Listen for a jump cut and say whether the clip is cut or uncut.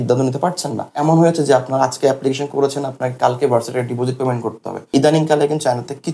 cut